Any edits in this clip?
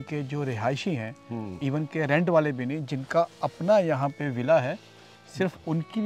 no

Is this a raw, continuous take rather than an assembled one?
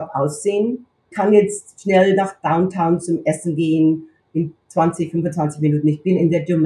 no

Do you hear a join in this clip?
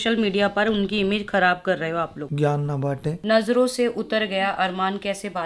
yes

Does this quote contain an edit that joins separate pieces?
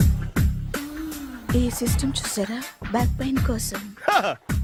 no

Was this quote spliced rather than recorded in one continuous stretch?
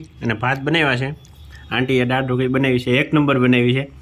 no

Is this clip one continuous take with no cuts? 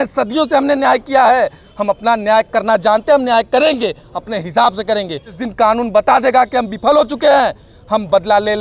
no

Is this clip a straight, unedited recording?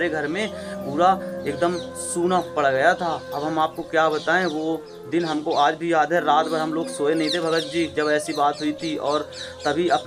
yes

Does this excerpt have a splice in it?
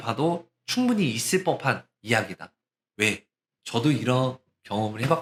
no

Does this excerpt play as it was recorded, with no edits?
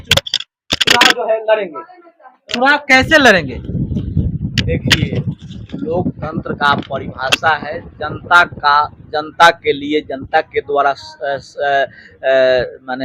yes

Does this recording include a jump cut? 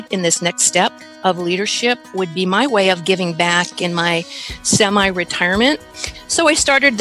yes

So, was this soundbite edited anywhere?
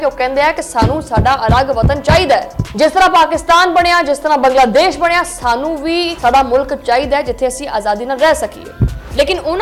no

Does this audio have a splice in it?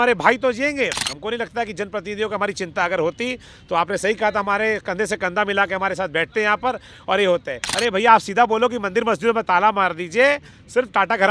yes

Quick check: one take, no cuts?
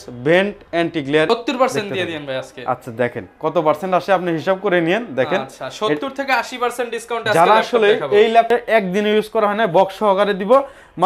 no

